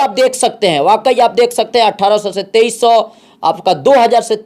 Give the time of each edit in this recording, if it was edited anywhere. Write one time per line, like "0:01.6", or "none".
none